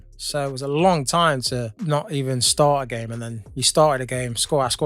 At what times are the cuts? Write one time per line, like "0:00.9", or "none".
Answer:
0:01.8